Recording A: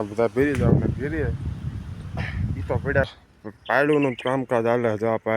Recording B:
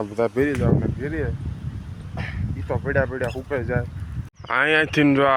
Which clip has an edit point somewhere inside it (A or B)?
A